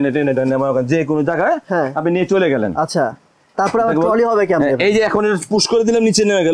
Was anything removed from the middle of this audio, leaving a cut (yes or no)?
no